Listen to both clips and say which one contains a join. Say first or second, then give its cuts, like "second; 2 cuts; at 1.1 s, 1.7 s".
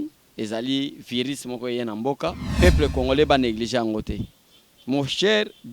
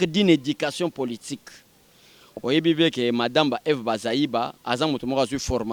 first; 1 cut; at 2.4 s